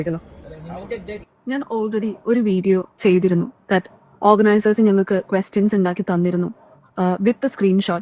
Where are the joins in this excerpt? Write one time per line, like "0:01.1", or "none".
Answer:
none